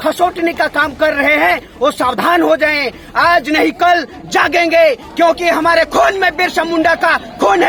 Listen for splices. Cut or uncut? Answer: uncut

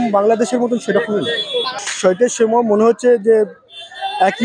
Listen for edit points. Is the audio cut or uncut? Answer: cut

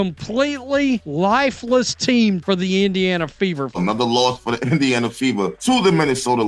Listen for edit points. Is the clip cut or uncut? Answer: cut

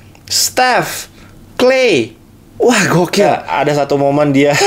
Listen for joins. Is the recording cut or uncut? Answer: cut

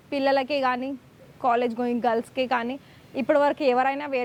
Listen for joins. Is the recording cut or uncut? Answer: uncut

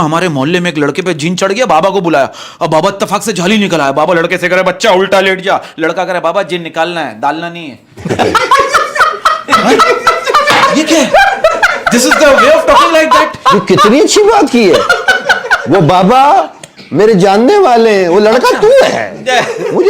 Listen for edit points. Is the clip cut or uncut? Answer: uncut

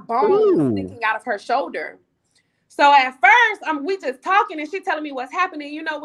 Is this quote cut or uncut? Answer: uncut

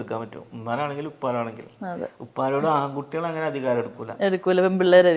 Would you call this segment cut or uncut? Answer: uncut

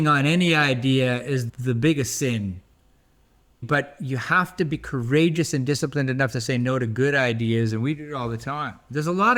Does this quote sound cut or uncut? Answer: uncut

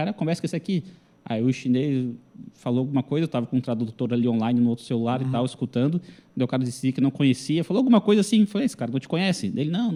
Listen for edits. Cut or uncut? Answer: uncut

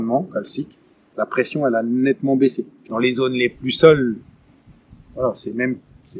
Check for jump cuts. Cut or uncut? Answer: cut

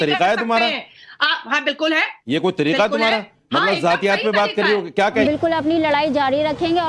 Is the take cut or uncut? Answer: cut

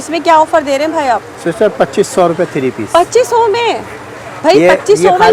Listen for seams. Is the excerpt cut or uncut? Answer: uncut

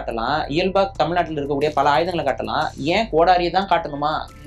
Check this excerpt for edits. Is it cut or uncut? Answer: uncut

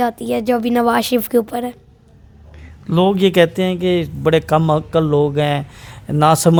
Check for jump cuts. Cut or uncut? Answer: uncut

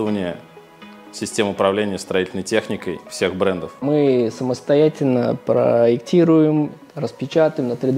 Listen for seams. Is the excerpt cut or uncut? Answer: cut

